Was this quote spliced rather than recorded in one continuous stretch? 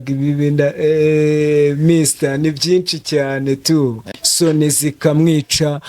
yes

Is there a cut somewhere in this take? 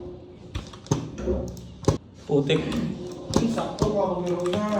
yes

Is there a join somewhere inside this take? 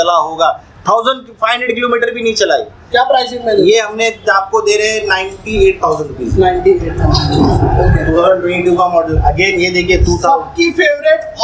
no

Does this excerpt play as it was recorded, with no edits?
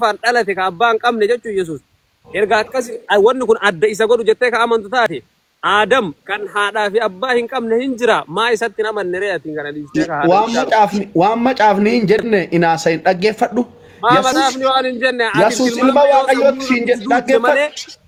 yes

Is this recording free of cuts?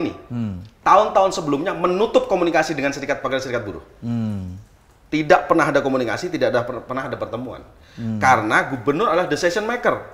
yes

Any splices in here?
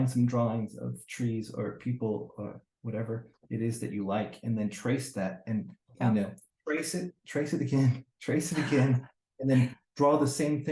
no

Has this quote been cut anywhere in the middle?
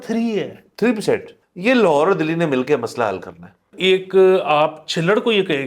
yes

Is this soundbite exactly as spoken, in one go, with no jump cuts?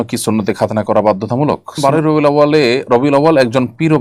no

